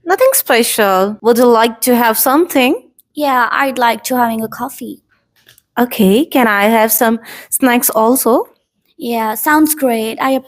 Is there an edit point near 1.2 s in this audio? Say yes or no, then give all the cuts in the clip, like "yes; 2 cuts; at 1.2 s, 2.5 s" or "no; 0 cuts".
yes; 1 cut; at 1.2 s